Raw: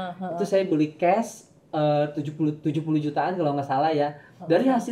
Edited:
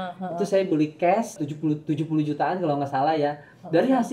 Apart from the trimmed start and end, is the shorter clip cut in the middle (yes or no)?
yes